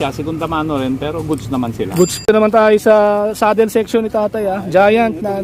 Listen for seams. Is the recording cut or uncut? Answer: cut